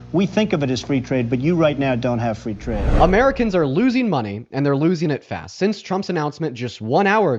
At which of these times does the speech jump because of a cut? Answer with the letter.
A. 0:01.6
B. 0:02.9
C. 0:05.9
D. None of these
B